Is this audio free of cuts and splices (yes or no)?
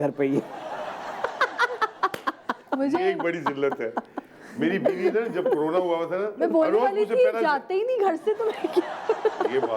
yes